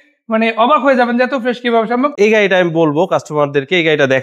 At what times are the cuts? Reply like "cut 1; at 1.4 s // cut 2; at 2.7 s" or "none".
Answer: cut 1; at 2.1 s